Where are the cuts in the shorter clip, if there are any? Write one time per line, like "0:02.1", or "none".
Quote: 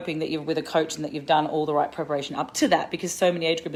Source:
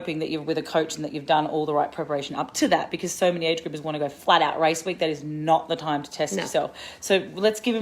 none